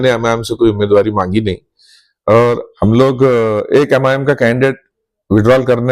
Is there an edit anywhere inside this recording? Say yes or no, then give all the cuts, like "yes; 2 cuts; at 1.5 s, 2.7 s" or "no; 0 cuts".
yes; 1 cut; at 2.7 s